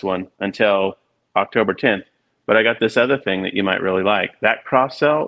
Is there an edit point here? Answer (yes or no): no